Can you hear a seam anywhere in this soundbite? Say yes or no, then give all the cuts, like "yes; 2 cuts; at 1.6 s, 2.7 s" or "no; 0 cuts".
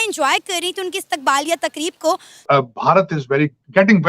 yes; 1 cut; at 2.4 s